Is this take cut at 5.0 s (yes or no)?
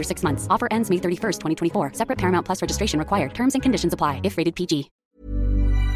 yes